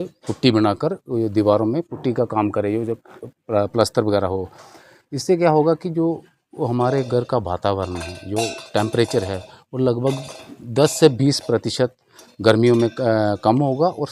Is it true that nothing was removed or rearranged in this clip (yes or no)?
yes